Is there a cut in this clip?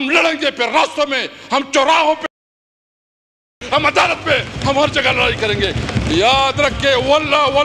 no; 0 cuts

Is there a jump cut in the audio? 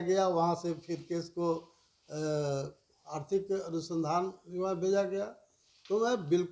no; 0 cuts

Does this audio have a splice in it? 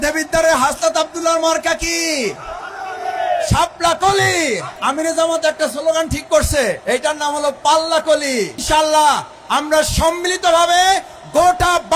yes; 3 cuts; at 4.7 s, 6.8 s, 8.6 s

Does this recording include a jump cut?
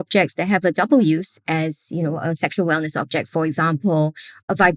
no; 0 cuts

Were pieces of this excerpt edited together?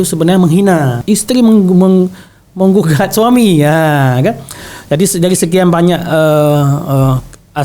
yes; 1 cut; at 1.0 s

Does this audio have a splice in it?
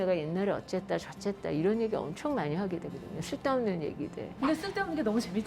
no; 0 cuts

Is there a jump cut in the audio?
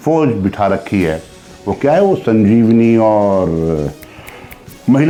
no; 0 cuts

